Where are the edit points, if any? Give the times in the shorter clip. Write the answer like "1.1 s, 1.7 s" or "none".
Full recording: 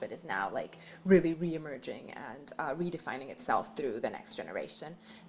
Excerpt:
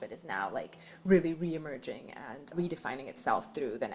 2.5 s